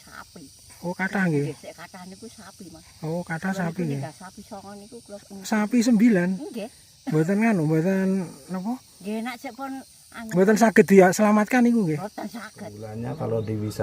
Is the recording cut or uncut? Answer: cut